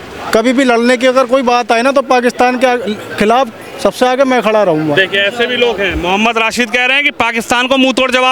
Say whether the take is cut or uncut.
uncut